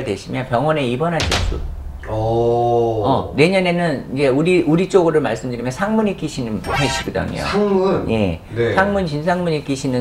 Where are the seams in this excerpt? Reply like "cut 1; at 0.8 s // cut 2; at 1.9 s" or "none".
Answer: none